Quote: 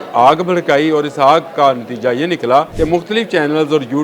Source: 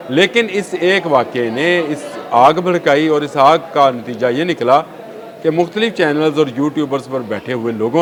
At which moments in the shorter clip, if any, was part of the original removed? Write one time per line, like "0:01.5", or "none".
0:02.7